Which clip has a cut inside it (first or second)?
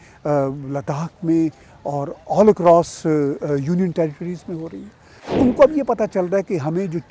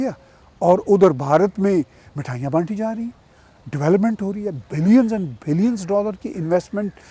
first